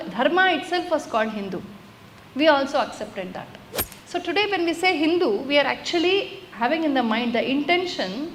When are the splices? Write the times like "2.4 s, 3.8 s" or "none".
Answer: none